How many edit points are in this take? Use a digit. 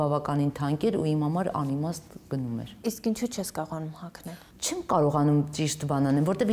0